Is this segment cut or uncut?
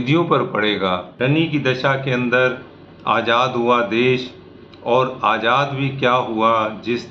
cut